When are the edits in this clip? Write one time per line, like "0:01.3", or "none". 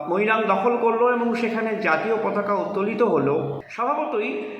0:03.6